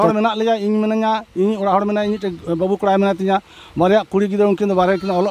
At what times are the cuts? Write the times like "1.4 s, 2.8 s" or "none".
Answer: none